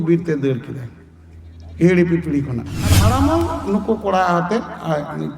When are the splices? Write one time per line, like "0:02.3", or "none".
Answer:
0:03.0